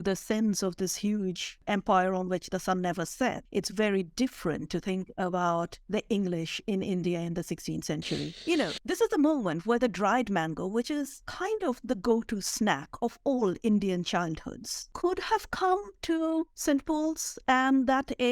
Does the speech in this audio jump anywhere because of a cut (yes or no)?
yes